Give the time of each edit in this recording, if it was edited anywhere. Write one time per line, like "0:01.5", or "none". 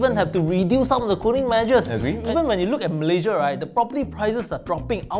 0:02.2

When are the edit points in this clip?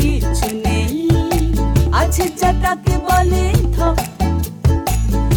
none

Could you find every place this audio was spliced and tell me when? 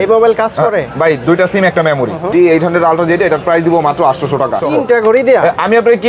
0:02.2
0:04.6

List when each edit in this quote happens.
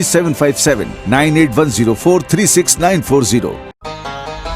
0:03.6

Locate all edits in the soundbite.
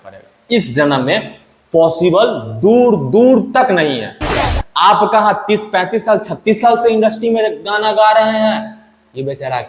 0:04.4

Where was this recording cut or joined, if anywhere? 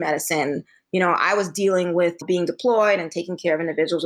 0:02.2

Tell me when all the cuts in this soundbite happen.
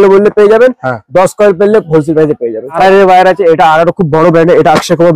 0:02.7

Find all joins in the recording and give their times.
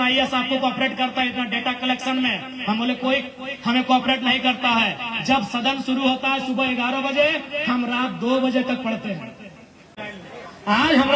0:10.1

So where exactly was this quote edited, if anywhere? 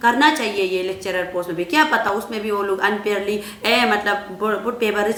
none

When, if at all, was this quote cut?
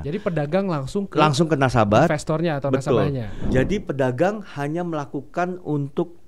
0:03.3

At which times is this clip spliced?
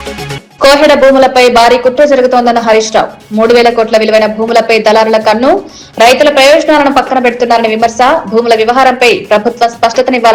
none

